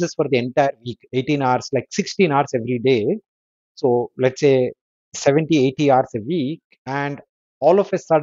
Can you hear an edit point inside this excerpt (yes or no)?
no